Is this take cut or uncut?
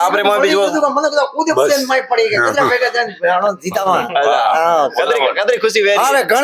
uncut